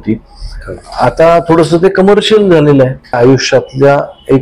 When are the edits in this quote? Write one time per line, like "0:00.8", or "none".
0:03.2